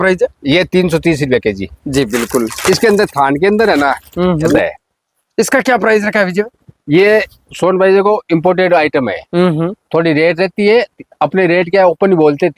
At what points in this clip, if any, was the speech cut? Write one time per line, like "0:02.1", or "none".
0:04.5

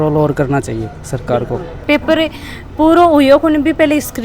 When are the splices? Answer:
none

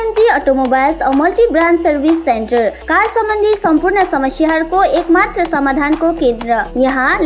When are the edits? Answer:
none

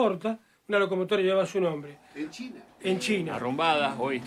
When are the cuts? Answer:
0:03.4

